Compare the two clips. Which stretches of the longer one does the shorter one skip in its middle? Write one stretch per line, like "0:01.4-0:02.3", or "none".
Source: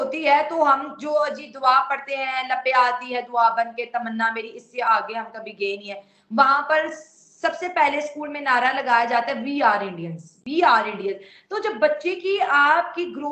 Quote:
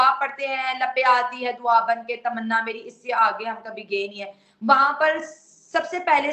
none

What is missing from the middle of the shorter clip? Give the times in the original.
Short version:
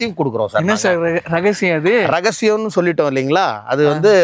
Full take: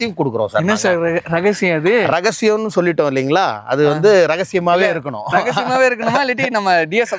none

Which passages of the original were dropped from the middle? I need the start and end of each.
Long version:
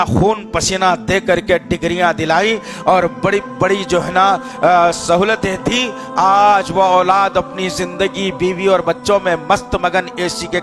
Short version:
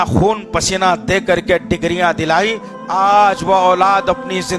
0:02.7-0:06.0

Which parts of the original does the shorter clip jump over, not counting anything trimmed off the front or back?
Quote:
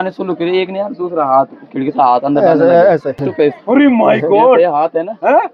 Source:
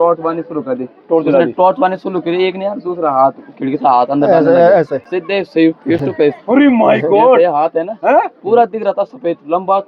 0:05.1-0:06.0

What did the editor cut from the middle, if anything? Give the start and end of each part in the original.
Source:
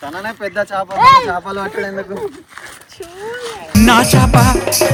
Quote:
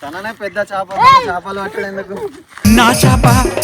0:02.4-0:03.5

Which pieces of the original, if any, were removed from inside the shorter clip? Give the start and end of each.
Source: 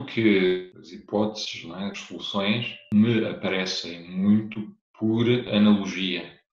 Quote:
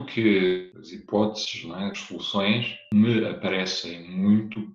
none

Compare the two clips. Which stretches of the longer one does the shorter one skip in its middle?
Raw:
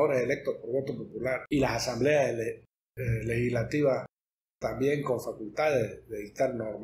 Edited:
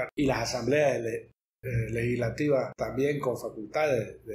0:04.1-0:04.6

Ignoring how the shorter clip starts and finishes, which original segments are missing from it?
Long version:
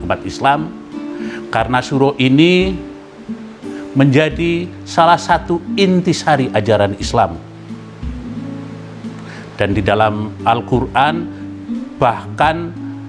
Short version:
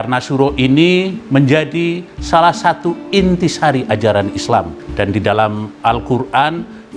0:02.8-0:03.8
0:07.4-0:09.4

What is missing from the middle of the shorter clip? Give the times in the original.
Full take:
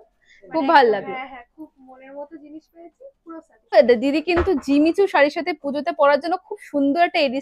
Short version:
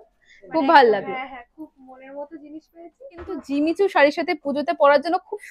0:03.4-0:04.6

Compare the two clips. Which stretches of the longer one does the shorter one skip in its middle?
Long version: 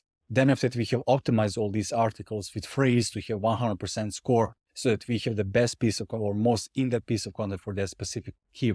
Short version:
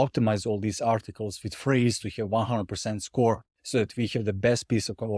none

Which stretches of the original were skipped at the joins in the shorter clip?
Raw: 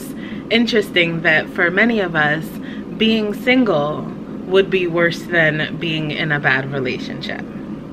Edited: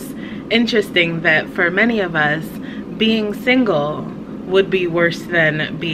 none

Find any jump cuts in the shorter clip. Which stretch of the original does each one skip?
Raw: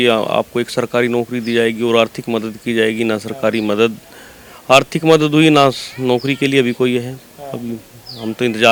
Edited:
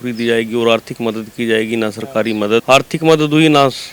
0:03.9-0:04.6

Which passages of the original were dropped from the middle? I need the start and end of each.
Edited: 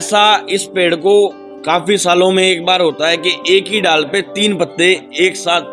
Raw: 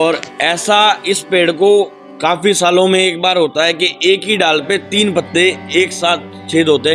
none

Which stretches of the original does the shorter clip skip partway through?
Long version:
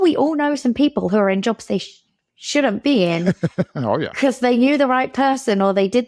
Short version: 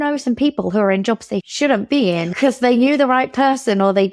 0:01.9-0:02.4
0:03.2-0:04.1

